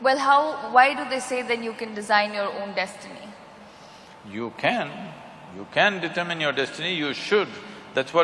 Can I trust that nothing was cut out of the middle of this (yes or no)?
yes